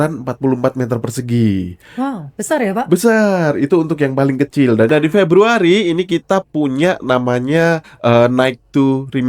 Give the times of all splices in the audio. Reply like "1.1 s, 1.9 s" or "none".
4.9 s